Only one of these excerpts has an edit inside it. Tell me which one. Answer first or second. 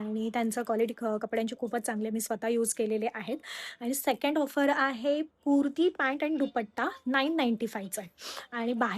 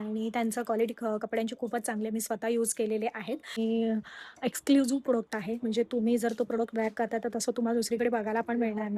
second